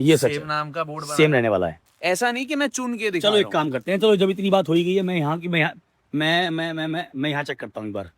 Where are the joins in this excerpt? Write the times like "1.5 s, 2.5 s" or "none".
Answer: 1.9 s

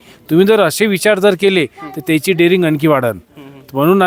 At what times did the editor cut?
none

